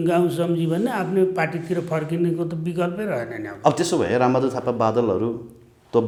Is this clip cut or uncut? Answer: uncut